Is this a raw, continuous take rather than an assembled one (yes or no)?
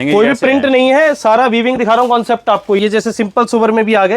no